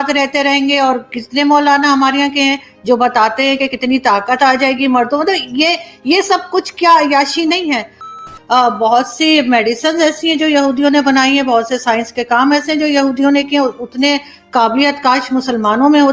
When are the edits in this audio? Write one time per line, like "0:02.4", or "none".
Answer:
0:08.2